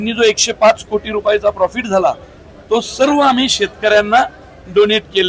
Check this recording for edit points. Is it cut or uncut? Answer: uncut